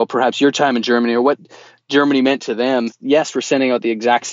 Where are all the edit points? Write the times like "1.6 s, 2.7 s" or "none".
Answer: 2.9 s